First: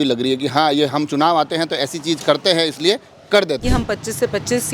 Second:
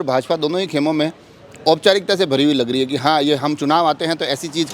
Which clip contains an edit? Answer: first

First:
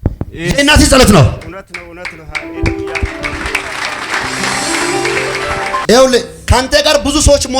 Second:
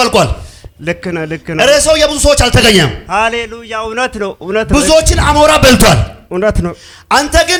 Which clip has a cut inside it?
first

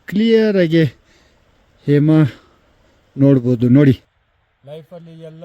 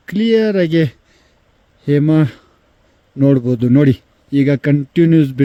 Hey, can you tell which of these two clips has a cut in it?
first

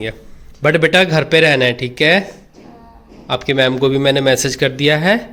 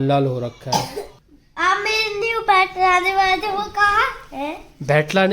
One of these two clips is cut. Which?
second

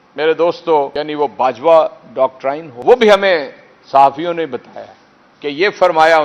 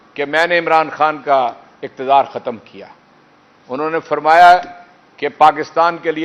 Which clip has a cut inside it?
first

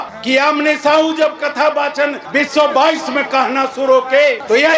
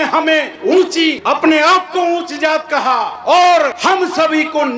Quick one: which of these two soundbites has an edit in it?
second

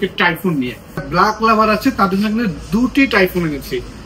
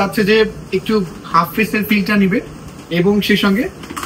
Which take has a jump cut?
first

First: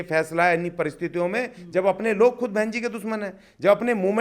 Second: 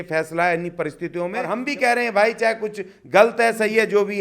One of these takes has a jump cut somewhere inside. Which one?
second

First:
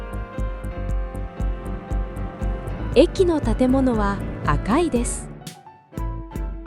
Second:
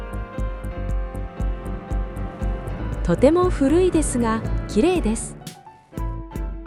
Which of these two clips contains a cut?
first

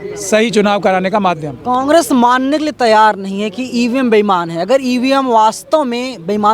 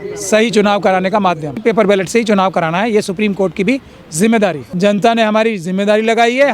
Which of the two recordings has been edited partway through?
second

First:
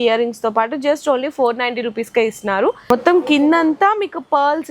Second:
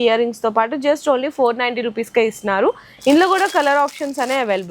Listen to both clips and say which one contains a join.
first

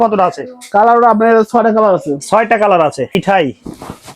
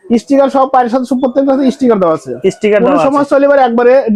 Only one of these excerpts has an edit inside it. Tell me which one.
first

